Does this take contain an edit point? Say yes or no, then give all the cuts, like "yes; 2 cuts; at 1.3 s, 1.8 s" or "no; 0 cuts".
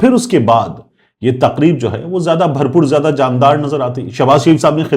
no; 0 cuts